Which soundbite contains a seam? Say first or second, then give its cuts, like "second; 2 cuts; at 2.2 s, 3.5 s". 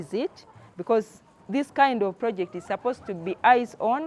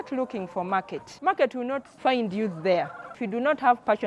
second; 3 cuts; at 1.0 s, 1.9 s, 3.2 s